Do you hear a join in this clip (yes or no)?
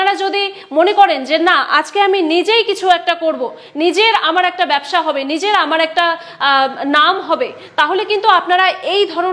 no